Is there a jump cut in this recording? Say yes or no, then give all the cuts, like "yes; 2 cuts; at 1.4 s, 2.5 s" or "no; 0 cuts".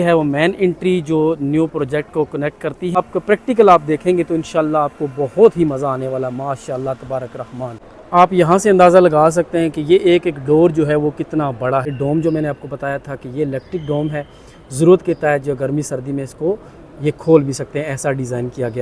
yes; 3 cuts; at 3.0 s, 7.9 s, 11.9 s